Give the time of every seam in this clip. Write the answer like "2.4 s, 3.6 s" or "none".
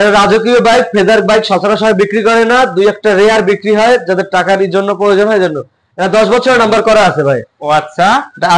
none